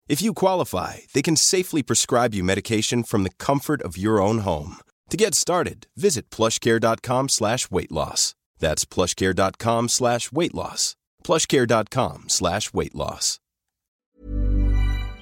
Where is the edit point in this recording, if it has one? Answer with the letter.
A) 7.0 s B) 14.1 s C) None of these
B